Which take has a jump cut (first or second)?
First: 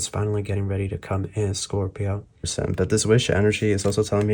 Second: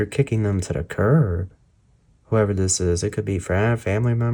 first